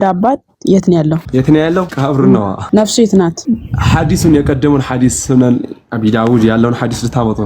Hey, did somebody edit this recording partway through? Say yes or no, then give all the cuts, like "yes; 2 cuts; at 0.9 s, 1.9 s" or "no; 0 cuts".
yes; 4 cuts; at 1.2 s, 1.9 s, 2.6 s, 3.4 s